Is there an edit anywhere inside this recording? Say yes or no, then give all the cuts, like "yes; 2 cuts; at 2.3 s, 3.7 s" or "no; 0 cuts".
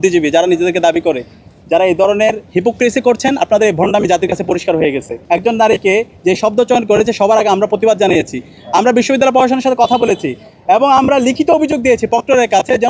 yes; 1 cut; at 5.2 s